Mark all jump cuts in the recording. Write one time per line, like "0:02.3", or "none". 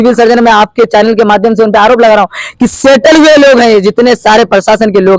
none